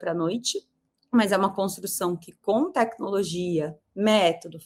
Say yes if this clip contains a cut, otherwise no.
no